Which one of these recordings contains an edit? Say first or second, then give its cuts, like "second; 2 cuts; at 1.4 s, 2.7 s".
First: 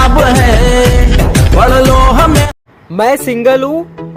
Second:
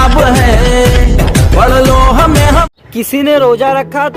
first; 1 cut; at 2.4 s